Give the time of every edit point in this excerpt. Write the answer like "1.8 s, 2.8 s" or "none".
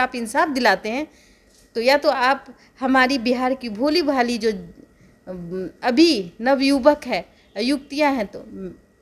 none